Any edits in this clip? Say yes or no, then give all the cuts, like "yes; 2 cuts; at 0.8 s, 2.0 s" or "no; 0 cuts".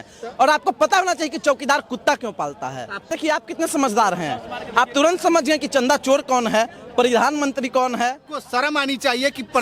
yes; 2 cuts; at 3.1 s, 8.3 s